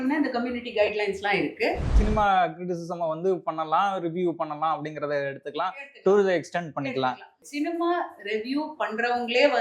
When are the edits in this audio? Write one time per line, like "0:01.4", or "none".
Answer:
0:02.0
0:07.3